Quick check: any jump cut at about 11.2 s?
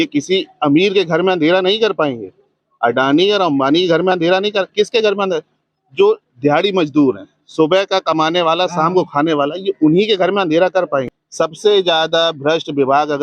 yes; 1 cut; at 11.2 s

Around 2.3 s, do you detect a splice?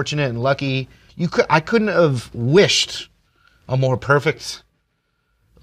no; 1 cut; at 1.0 s

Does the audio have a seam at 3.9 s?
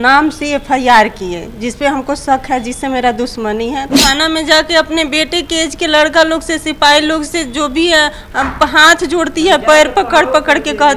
yes; 1 cut; at 3.9 s

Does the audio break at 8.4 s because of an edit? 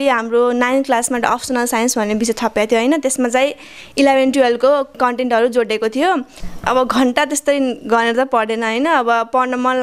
no; 1 cut; at 6.4 s

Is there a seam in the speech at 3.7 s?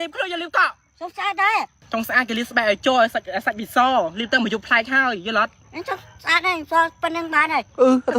no; 1 cut; at 1.8 s

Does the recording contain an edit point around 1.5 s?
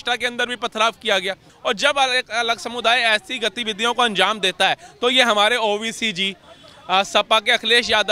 yes; 1 cut; at 1.5 s

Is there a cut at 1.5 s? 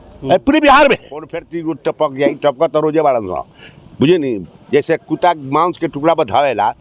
yes; 1 cut; at 1.5 s

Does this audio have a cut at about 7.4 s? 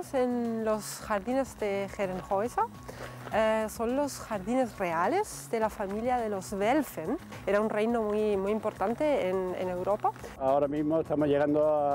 yes; 2 cuts; at 7.4 s, 10.3 s

